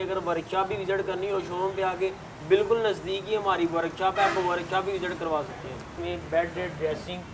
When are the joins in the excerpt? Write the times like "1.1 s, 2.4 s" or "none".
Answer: 5.9 s